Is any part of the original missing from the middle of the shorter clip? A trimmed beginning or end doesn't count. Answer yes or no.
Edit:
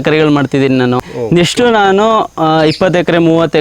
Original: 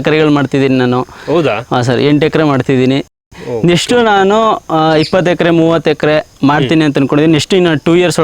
yes